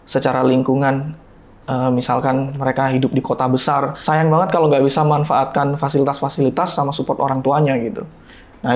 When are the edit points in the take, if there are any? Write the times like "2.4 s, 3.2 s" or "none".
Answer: 4.0 s